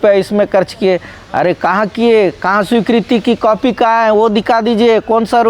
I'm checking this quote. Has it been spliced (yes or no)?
no